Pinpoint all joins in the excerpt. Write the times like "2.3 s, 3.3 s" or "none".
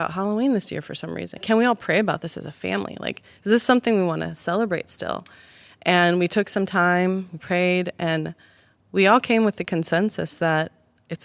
1.4 s